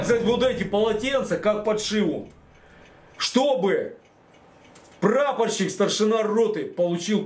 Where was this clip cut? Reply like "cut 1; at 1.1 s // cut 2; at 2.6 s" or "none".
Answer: none